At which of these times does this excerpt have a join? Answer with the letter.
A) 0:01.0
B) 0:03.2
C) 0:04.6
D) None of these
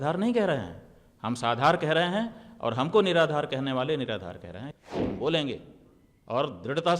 C